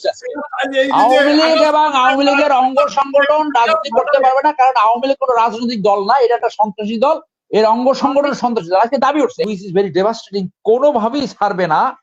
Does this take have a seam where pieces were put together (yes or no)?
yes